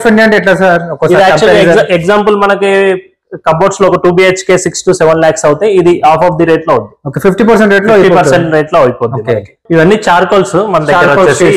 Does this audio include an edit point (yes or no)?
yes